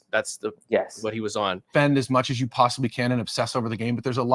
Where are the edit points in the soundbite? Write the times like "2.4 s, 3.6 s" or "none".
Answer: 1.6 s